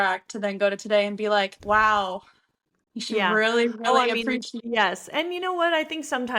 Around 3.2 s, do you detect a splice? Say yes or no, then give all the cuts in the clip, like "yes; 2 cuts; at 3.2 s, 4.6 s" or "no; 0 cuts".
no; 2 cuts; at 1.6 s, 4.5 s